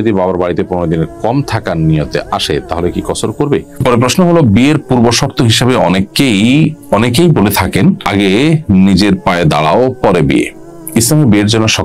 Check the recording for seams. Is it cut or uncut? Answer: cut